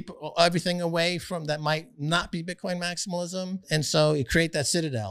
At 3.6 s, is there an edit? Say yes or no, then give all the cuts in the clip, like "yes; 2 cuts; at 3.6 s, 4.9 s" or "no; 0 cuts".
yes; 1 cut; at 3.6 s